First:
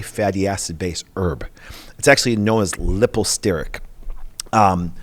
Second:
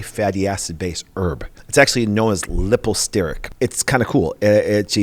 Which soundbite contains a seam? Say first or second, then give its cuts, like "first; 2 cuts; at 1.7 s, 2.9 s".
second; 2 cuts; at 1.5 s, 3.4 s